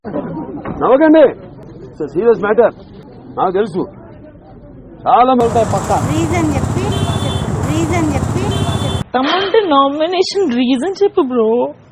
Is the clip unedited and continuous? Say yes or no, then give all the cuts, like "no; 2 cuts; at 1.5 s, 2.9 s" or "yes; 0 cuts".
no; 1 cut; at 5.4 s